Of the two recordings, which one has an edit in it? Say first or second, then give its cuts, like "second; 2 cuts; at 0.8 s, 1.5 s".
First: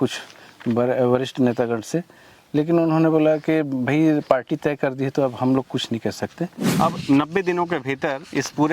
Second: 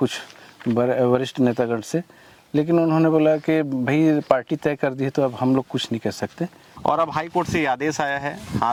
first; 1 cut; at 6.6 s